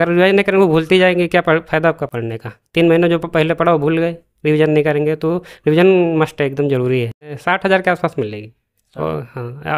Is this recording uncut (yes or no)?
no